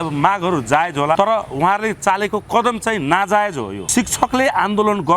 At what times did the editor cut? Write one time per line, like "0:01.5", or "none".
0:01.2
0:03.7